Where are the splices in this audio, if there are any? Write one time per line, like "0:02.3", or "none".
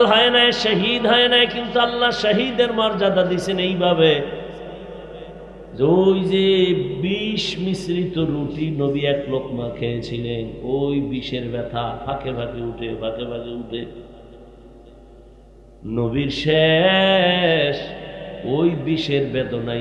none